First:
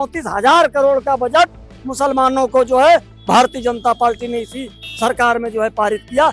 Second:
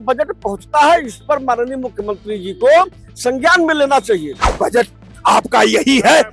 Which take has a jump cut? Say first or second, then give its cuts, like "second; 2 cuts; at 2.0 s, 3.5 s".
second; 1 cut; at 4.4 s